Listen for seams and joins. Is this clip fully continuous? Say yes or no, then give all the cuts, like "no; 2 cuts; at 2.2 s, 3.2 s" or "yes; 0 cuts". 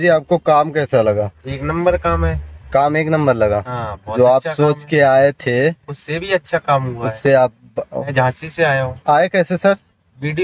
no; 1 cut; at 8.1 s